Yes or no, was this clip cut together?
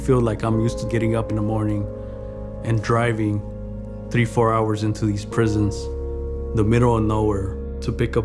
no